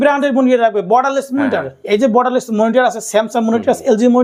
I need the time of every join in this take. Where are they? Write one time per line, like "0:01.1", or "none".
none